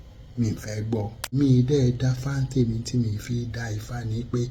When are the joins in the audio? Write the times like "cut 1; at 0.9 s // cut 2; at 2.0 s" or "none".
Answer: cut 1; at 1.4 s